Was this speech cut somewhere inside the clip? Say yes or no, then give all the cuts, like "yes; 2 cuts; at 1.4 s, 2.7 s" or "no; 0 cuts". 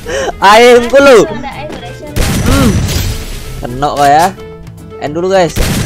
no; 0 cuts